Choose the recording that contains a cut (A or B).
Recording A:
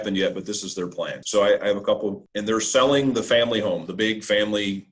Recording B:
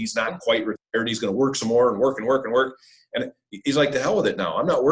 A